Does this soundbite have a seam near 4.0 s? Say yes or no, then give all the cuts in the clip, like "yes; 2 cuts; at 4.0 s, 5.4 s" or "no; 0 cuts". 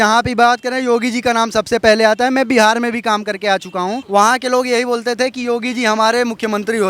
yes; 1 cut; at 4.0 s